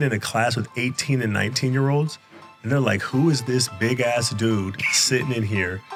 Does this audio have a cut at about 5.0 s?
no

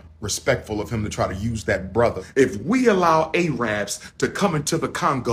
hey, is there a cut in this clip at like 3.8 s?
no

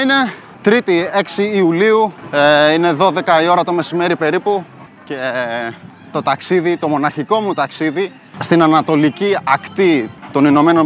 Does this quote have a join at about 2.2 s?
no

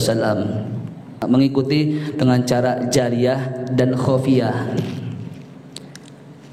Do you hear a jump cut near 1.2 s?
yes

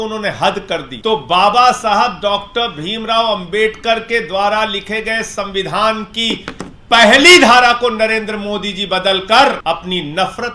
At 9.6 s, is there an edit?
yes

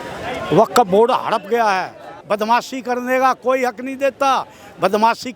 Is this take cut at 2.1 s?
yes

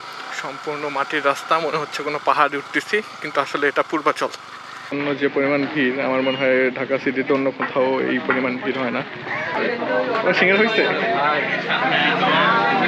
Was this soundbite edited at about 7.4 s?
no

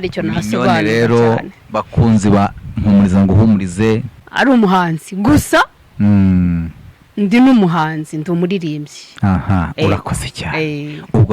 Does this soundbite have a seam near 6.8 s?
no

